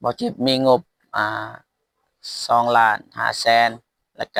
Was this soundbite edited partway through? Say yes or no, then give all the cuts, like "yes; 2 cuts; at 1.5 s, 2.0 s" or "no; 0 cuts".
no; 0 cuts